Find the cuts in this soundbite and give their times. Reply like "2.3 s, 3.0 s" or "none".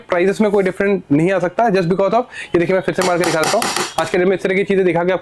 none

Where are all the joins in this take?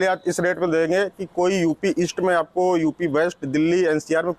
none

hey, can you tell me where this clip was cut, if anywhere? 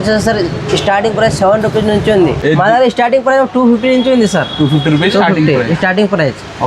2.4 s

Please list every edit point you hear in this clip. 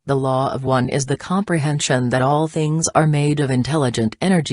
0.9 s

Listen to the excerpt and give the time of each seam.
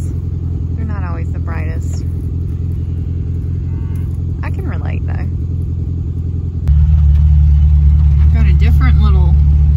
none

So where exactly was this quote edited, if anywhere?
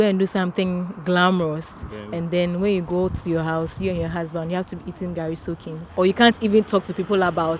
5.8 s

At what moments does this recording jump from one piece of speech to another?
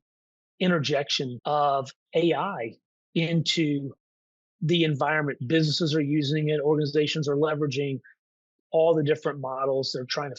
1.4 s

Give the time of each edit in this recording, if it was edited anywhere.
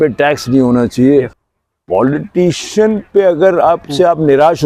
1.4 s

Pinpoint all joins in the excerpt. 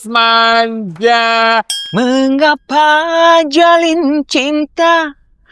1.8 s

